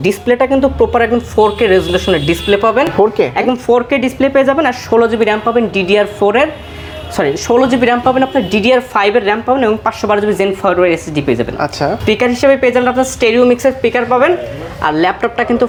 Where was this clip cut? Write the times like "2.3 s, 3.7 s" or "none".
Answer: none